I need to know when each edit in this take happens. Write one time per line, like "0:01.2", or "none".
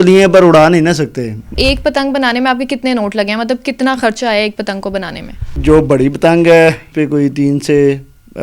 0:01.6
0:05.6
0:06.9